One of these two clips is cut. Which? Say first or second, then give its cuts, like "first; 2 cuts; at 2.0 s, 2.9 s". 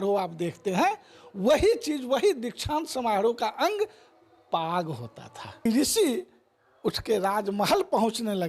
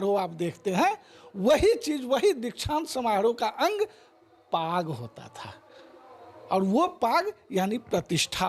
first; 1 cut; at 5.7 s